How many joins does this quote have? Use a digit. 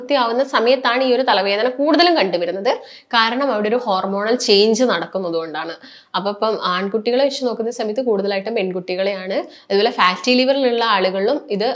0